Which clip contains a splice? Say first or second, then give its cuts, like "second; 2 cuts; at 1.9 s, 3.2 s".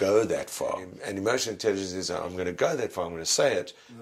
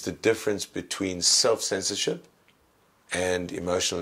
first; 1 cut; at 1.0 s